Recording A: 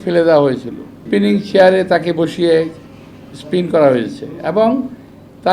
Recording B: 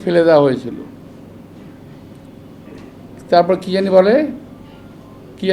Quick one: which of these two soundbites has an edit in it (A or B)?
A